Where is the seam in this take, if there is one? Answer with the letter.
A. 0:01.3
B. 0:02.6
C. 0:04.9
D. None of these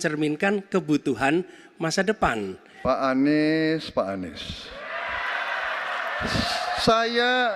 B